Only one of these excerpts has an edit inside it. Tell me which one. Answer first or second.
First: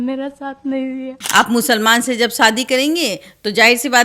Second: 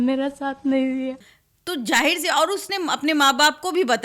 first